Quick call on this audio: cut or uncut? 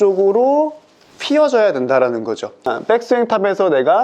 cut